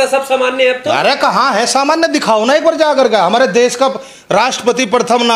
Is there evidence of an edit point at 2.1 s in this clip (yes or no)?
no